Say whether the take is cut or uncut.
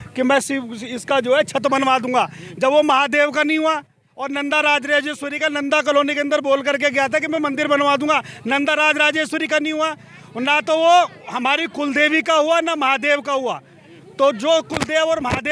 uncut